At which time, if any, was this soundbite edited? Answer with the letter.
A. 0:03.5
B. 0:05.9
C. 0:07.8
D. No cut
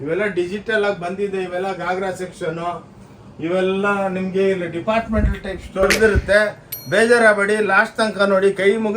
B